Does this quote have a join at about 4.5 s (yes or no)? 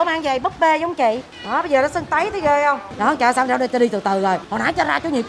yes